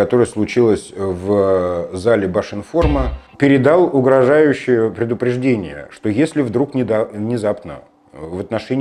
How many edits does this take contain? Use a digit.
1